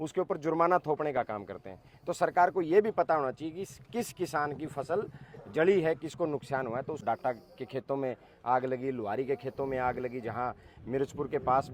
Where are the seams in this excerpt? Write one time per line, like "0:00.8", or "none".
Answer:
0:07.0